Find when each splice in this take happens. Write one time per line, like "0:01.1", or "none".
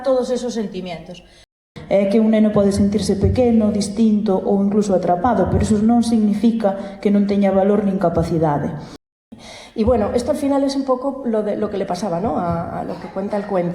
0:01.7
0:09.0